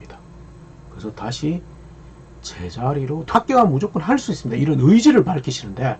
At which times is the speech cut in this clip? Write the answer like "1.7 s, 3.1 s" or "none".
3.3 s